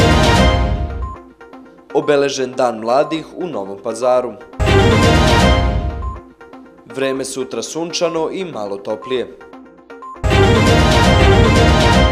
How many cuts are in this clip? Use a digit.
1